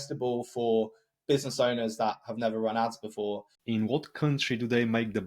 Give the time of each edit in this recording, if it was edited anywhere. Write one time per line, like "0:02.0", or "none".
0:03.5